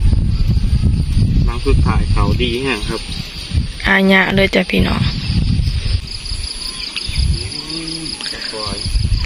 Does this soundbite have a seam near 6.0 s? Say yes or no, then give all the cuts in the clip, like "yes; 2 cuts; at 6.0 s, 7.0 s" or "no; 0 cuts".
yes; 1 cut; at 6.0 s